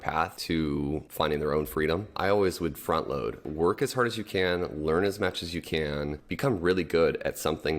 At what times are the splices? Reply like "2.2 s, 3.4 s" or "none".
0.9 s, 2.1 s, 3.5 s, 6.2 s

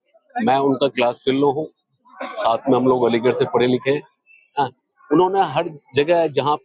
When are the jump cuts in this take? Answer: none

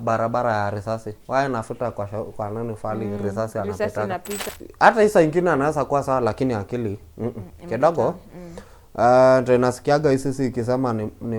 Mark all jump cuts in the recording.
4.4 s

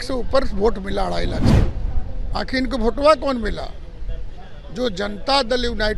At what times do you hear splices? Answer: 1.5 s

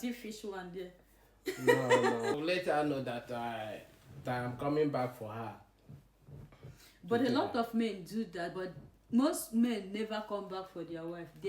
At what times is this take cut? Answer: 2.4 s

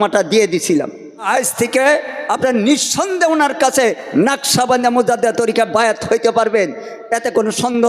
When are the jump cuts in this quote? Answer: 1.3 s

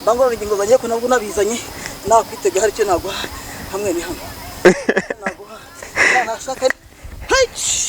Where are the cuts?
6.7 s

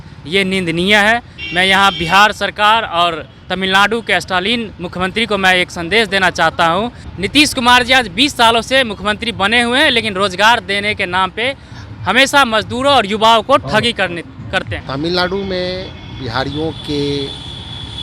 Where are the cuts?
7.0 s, 14.8 s

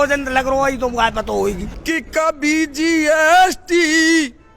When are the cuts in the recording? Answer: 1.7 s

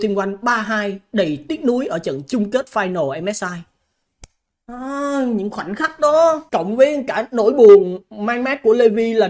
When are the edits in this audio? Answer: 6.4 s

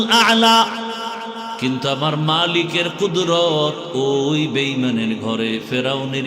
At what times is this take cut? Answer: 1.5 s

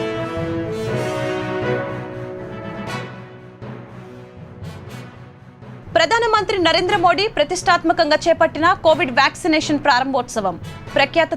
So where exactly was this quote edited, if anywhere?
none

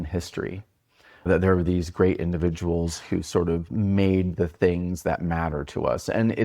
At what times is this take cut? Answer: 1.3 s

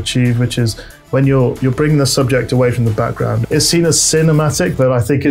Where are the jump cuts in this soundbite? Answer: 3.4 s

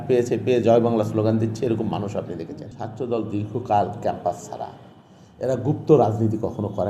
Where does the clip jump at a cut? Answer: 2.8 s

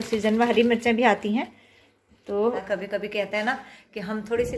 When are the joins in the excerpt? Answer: 2.7 s

